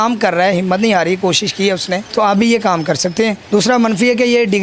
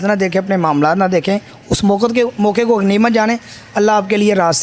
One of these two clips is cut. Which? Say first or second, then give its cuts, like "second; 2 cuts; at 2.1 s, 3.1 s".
first; 2 cuts; at 2.0 s, 3.4 s